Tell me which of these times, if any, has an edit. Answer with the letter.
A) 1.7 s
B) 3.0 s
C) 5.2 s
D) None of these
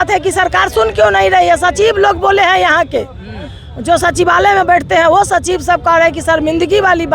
D